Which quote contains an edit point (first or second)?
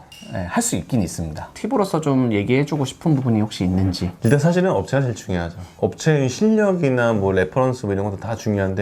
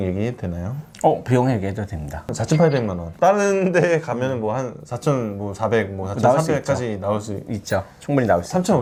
first